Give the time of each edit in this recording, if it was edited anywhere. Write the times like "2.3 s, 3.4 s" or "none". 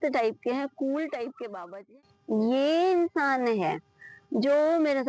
2.0 s